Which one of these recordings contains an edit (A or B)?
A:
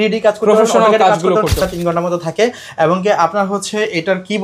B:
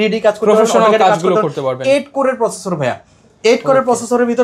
A